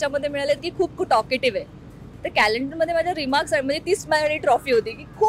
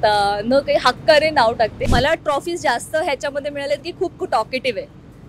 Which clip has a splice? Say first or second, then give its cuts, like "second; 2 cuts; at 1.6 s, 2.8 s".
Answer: second; 1 cut; at 1.8 s